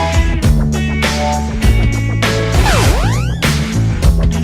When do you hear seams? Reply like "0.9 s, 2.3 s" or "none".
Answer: none